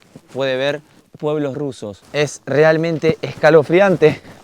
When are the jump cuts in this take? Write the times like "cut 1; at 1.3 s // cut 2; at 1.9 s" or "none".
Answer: cut 1; at 1.1 s // cut 2; at 2.0 s